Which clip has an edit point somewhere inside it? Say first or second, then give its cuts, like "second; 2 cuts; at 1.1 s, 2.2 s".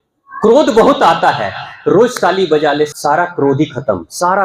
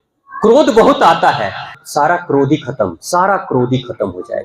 second; 1 cut; at 1.8 s